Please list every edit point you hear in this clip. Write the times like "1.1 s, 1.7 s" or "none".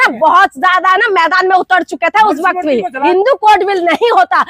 3.0 s